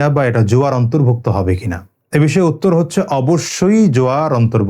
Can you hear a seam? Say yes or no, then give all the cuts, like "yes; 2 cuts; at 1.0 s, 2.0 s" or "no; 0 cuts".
no; 0 cuts